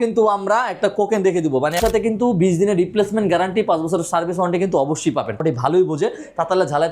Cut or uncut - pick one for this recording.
cut